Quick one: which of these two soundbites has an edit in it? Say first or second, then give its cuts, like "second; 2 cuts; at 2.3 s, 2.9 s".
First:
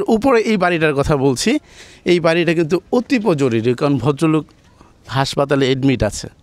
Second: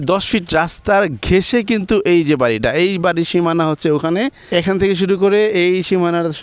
second; 1 cut; at 4.4 s